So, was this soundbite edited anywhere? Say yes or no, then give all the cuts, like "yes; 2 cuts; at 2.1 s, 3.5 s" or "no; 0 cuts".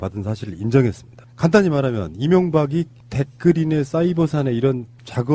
no; 0 cuts